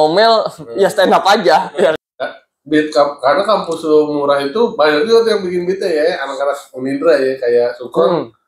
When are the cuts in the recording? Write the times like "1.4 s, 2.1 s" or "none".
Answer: 1.9 s